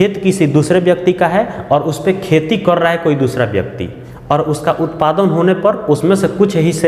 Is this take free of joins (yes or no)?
yes